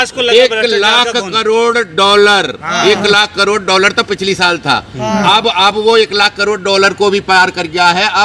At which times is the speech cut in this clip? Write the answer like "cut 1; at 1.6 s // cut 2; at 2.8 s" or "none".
none